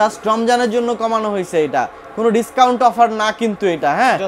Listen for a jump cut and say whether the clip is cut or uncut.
uncut